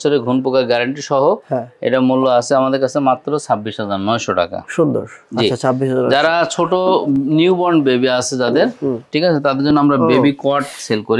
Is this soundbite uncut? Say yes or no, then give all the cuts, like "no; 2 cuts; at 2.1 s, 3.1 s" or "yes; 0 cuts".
yes; 0 cuts